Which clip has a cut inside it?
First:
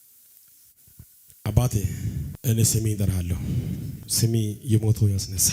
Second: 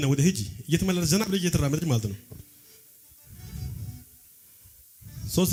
first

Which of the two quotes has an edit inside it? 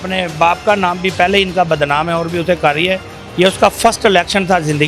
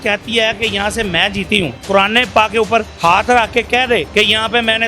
second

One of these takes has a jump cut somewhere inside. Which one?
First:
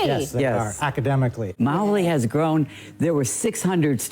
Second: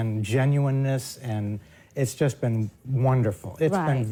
first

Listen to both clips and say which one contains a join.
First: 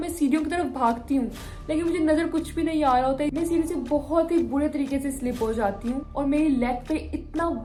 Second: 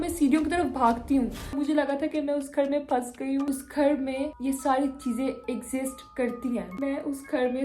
second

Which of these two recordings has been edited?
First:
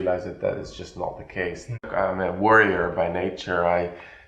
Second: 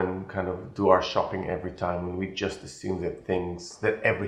first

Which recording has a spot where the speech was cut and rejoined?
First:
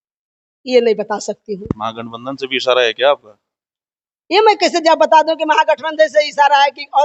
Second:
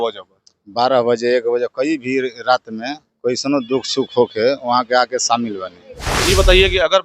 second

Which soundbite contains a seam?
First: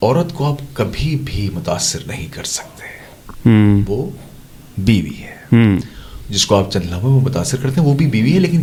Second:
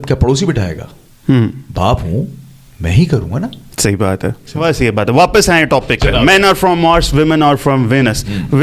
second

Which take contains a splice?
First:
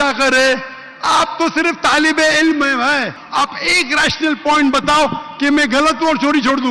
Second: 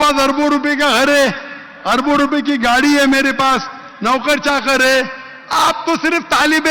first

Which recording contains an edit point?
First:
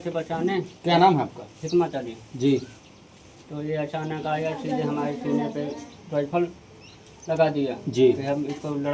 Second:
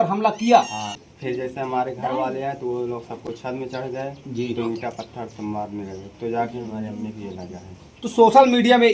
second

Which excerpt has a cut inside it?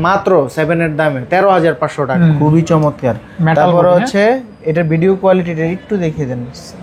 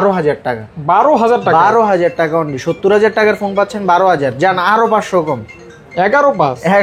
first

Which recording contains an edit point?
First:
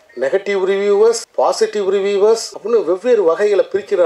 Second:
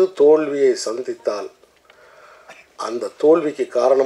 first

